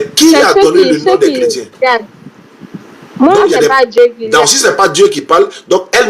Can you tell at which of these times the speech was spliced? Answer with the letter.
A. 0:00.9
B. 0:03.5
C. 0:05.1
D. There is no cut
B